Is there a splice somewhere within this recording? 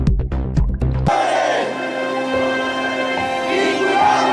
yes; 1 cut; at 1.0 s

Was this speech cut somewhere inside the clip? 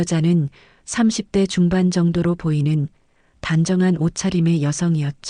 no; 0 cuts

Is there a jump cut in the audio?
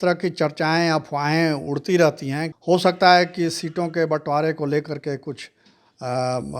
yes; 1 cut; at 2.5 s

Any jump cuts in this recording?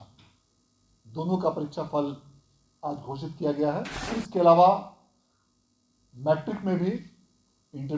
yes; 1 cut; at 4.0 s

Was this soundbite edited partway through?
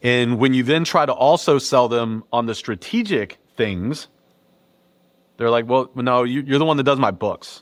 no; 0 cuts

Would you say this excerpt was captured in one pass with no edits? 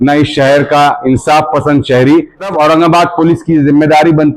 no; 1 cut; at 2.5 s

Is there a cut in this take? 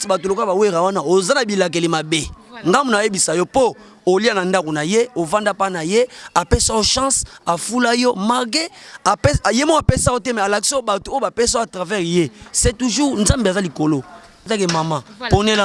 yes; 1 cut; at 14.5 s

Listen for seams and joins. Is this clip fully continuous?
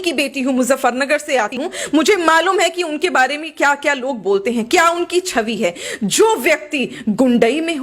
no; 1 cut; at 1.6 s

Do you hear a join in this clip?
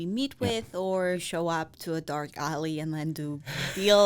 yes; 1 cut; at 1.2 s

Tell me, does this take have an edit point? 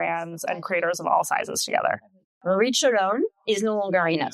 yes; 1 cut; at 2.2 s

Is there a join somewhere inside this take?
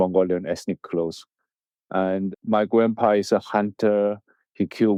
no; 0 cuts

